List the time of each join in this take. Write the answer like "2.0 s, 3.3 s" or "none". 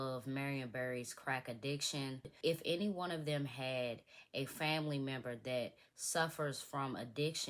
2.3 s